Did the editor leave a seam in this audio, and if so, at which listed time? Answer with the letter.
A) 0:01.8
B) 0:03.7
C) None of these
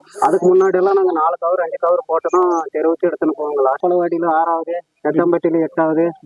B